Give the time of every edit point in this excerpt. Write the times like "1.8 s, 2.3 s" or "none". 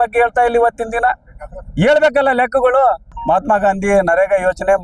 3.1 s